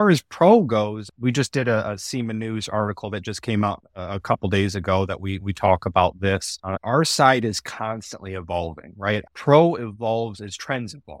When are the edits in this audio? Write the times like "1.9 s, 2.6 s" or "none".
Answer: 1.0 s, 6.8 s, 9.2 s